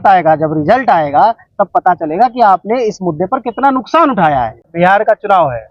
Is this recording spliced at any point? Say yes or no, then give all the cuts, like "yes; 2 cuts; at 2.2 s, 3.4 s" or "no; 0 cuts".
yes; 1 cut; at 4.6 s